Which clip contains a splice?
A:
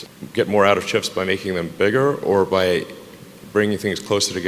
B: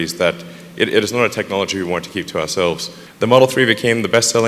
B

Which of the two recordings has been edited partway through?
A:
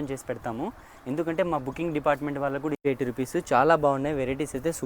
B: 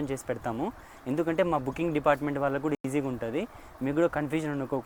A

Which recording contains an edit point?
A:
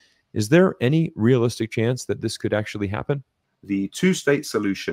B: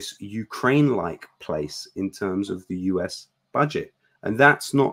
A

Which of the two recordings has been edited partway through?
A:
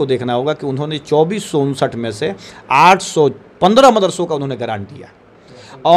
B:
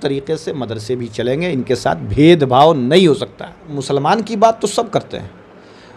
B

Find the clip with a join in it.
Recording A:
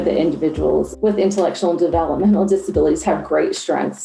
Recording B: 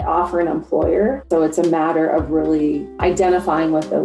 B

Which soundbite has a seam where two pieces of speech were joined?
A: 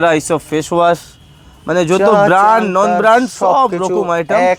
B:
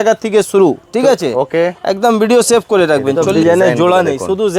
B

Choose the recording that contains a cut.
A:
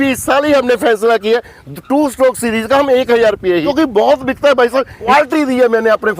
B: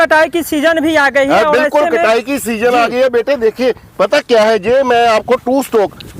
A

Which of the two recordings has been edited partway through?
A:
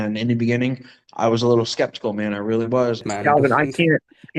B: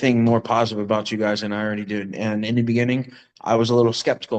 A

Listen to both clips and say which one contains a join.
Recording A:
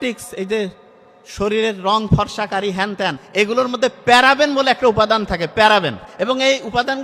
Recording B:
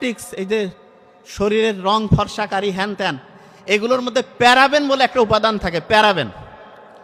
A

